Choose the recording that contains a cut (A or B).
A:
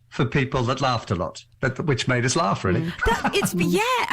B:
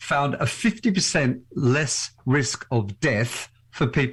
A